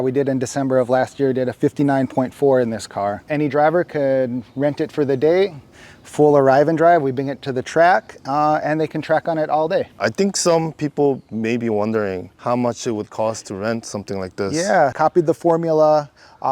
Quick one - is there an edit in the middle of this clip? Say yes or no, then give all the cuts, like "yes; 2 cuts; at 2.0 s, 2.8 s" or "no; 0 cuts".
yes; 3 cuts; at 3.3 s, 10.0 s, 14.9 s